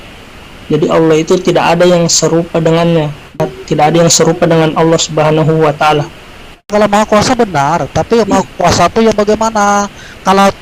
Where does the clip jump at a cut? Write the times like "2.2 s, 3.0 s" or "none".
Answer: 3.4 s, 6.7 s